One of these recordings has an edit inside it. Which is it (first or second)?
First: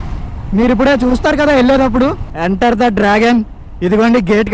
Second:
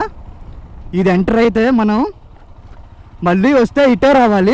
first